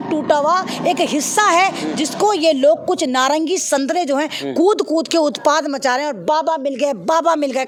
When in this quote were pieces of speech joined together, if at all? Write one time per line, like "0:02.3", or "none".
none